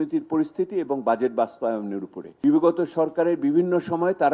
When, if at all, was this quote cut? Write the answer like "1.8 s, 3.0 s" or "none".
2.4 s